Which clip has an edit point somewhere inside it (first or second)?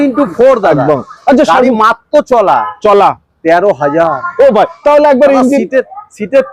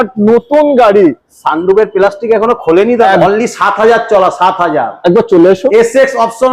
second